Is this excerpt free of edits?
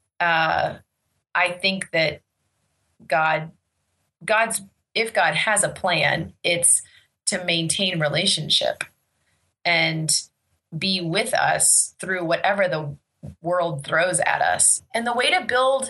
no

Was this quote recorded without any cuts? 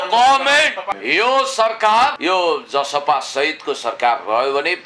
no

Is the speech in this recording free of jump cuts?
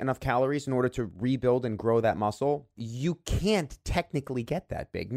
no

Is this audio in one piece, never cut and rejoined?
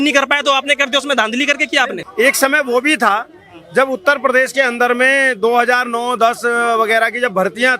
no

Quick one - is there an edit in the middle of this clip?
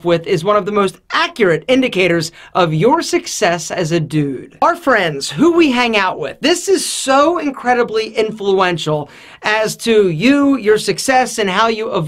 no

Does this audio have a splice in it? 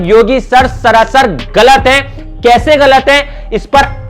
no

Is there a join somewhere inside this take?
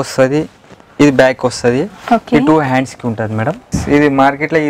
yes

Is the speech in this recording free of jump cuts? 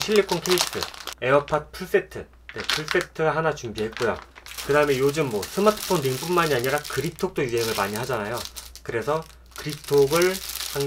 no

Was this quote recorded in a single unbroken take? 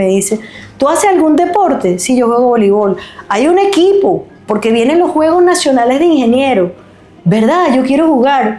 yes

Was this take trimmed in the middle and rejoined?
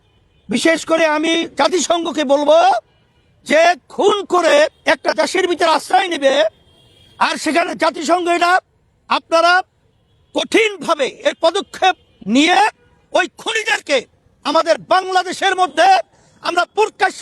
no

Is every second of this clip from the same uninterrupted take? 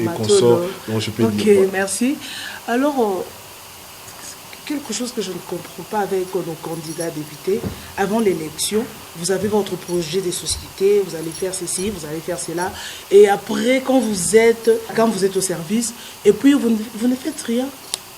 no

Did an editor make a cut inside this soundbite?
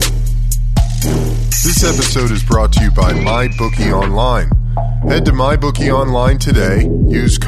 no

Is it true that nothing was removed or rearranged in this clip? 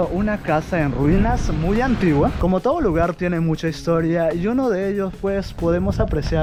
yes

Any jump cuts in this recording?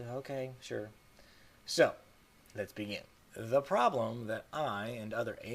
yes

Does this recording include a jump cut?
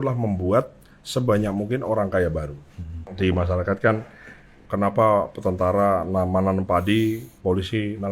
yes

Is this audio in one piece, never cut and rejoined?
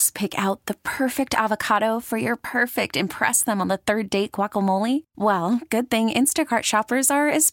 yes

